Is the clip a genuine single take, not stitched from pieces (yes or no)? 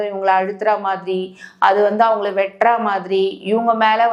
yes